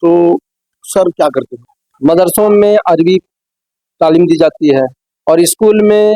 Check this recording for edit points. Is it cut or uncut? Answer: cut